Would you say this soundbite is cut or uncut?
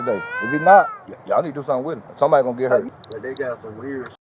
cut